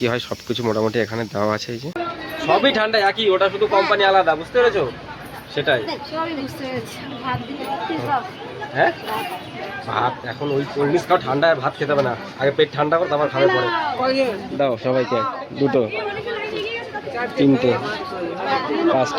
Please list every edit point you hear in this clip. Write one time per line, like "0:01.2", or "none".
0:02.0